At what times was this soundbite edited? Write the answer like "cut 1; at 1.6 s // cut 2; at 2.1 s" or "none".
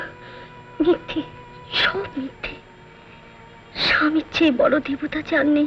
none